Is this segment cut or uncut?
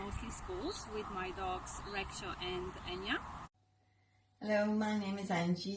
cut